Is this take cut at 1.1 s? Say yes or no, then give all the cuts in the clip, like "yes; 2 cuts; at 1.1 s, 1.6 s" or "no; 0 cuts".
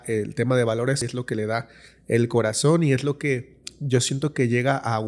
yes; 1 cut; at 1.1 s